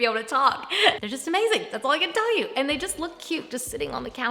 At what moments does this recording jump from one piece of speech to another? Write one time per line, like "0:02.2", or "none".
0:01.0